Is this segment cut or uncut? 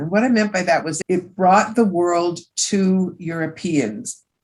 uncut